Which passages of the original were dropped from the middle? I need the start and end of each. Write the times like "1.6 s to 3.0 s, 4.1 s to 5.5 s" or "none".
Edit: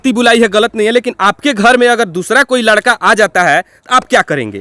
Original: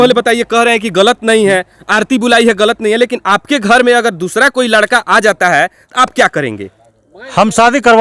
none

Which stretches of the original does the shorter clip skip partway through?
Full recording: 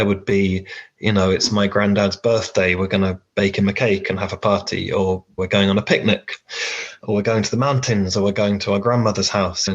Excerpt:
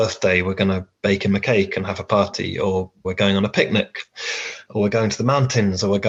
none

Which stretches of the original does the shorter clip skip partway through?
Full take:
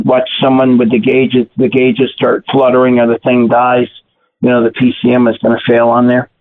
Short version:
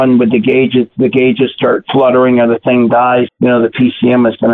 3.9 s to 4.3 s

